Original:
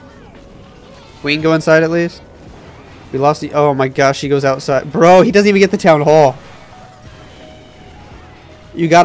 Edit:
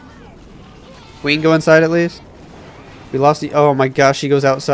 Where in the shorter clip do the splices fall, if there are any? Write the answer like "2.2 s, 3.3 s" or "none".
none